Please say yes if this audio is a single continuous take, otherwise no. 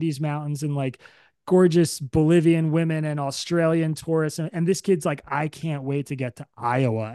yes